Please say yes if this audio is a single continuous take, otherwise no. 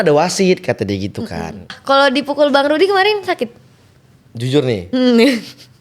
no